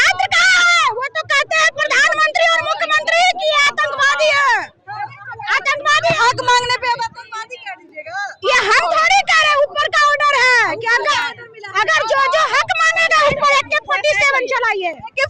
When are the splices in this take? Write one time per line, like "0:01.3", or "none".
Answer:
none